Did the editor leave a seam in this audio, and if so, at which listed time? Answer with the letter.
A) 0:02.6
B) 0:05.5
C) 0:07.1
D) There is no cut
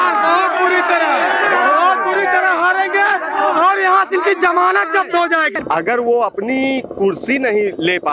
B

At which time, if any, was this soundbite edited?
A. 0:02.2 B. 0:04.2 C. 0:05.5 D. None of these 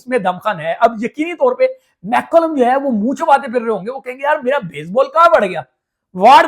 D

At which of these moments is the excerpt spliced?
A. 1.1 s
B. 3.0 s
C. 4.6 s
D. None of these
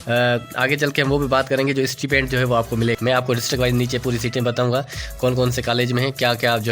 B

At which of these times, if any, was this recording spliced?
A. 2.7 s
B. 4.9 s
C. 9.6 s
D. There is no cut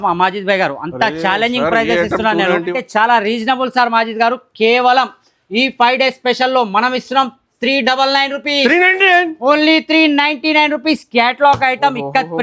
A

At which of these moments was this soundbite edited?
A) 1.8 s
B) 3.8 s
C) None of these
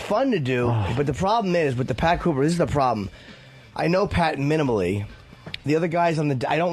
C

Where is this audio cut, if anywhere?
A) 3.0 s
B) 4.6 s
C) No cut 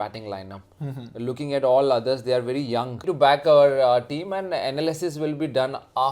A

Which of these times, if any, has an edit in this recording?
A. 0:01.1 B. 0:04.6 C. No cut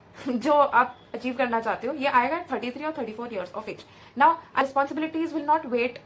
B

